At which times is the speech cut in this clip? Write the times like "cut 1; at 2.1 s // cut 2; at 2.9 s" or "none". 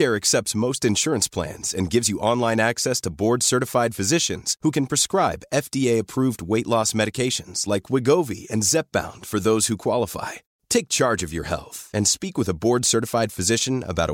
none